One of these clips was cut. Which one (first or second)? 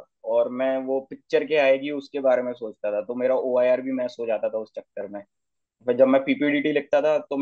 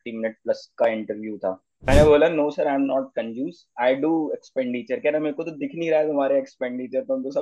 second